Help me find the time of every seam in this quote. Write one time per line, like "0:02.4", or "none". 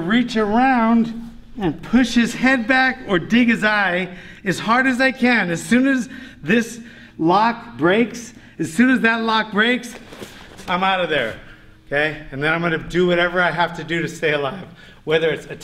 none